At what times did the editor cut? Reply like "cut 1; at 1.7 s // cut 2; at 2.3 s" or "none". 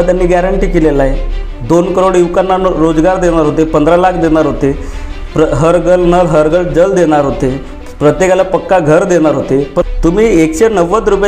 cut 1; at 9.9 s